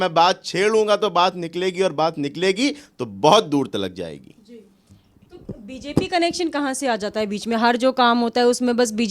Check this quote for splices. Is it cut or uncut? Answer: uncut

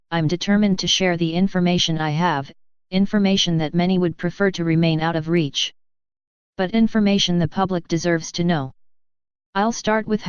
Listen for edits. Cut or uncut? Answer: cut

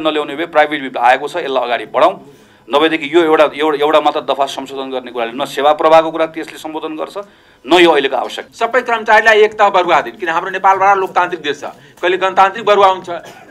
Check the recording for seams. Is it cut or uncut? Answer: cut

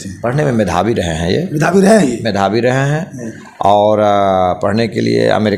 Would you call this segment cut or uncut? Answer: uncut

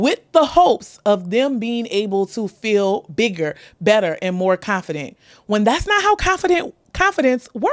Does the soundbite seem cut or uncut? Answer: uncut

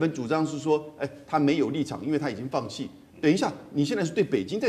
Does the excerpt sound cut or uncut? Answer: uncut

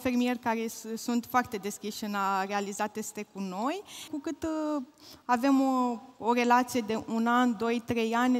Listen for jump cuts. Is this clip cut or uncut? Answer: cut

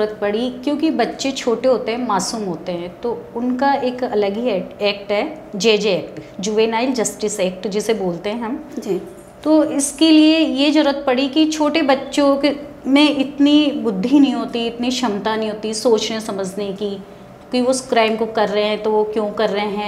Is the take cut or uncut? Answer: uncut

